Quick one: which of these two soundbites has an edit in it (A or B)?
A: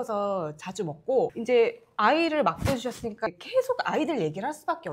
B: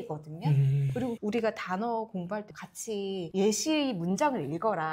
B